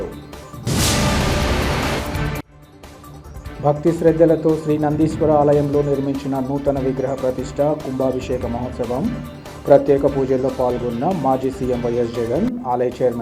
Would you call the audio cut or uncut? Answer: uncut